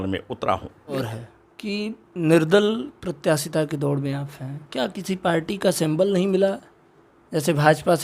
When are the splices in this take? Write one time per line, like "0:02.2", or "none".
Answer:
0:01.0